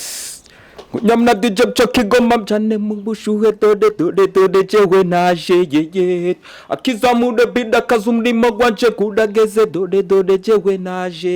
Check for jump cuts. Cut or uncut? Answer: uncut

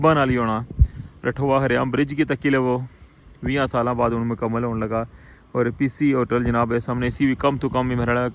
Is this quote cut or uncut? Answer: uncut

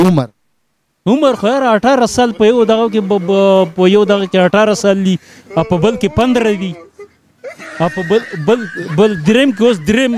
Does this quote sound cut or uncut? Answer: uncut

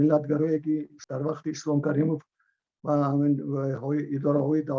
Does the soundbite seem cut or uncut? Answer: cut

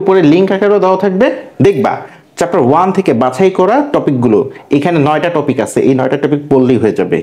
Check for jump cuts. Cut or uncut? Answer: uncut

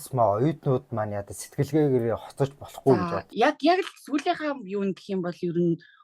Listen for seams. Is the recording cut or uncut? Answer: cut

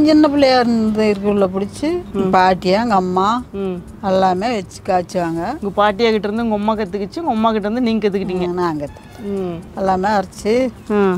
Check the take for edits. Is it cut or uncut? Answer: uncut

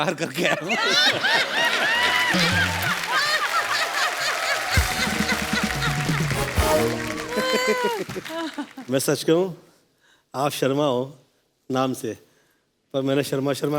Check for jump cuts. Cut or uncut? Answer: uncut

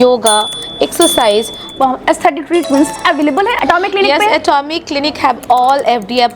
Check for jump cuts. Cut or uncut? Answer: cut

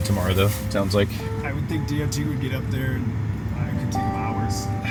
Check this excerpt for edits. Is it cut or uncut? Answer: uncut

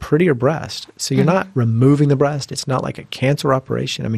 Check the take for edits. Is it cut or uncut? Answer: uncut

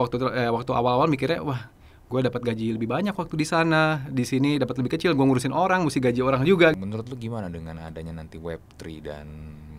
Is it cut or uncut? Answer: cut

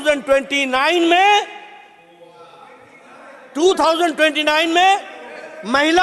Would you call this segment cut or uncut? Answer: uncut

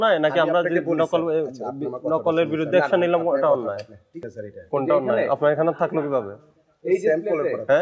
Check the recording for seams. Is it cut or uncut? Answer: cut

